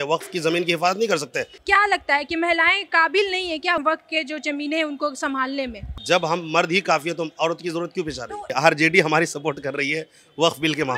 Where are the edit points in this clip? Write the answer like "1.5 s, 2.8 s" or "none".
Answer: 1.6 s, 8.5 s

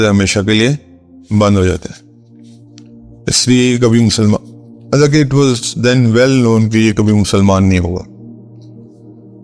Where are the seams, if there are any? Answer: 8.5 s

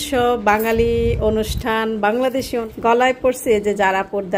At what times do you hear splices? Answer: 2.6 s

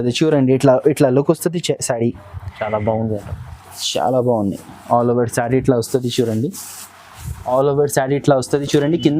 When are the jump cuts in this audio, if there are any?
7.5 s

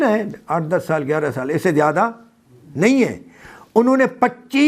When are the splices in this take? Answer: none

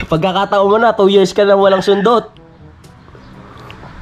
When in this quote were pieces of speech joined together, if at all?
none

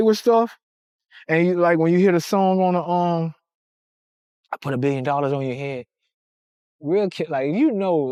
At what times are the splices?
none

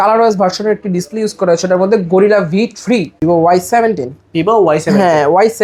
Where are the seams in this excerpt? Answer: 3.2 s

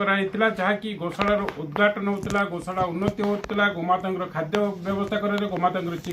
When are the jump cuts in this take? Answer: none

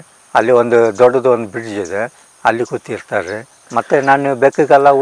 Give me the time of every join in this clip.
none

